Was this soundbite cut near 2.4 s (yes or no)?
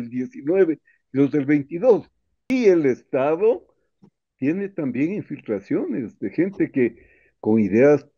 yes